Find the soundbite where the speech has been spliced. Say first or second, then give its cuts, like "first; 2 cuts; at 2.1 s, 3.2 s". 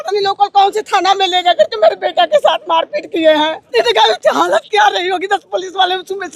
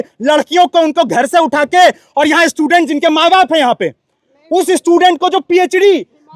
first; 1 cut; at 3.7 s